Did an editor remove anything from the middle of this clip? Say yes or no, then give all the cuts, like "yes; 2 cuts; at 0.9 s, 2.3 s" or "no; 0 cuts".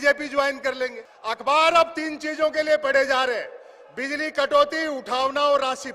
yes; 1 cut; at 1.1 s